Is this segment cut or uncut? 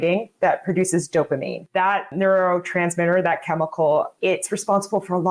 cut